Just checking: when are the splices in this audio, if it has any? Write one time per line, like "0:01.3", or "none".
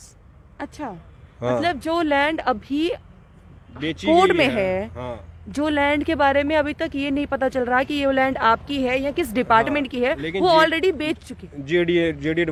none